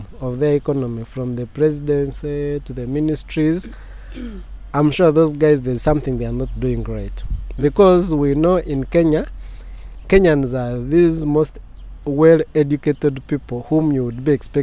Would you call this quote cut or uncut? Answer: uncut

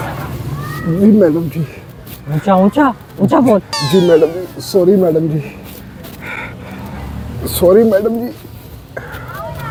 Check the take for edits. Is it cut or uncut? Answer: uncut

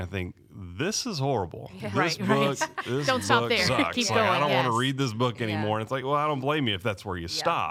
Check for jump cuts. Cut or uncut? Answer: uncut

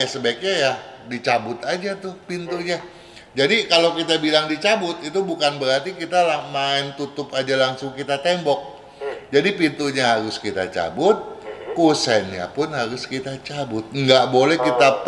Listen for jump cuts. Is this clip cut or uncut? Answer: uncut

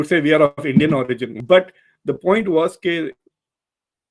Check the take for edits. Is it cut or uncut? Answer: cut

